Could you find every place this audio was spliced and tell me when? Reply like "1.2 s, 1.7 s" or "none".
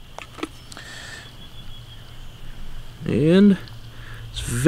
none